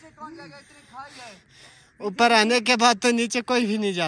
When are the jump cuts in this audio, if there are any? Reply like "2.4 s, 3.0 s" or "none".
none